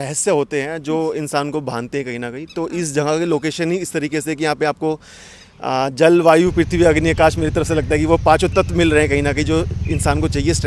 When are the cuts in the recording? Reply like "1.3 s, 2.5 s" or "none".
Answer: none